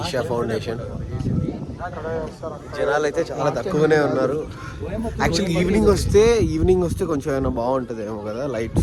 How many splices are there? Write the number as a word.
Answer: zero